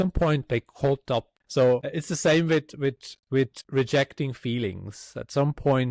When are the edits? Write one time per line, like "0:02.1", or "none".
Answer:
0:01.4
0:01.9
0:03.6